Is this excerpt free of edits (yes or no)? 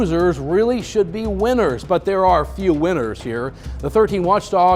yes